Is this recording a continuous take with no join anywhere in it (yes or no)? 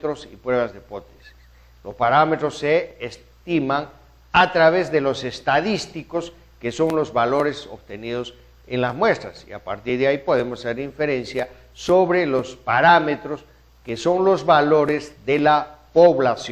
yes